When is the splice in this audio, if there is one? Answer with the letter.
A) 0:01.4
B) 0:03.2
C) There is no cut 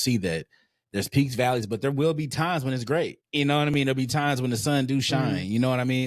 B